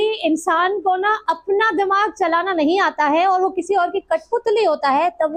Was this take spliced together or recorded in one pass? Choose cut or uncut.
uncut